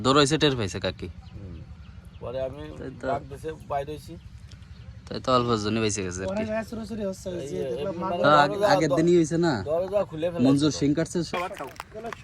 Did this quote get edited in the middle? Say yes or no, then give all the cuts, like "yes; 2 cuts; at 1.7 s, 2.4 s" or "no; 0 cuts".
yes; 1 cut; at 11.3 s